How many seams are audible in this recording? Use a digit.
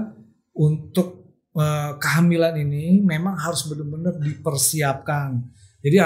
0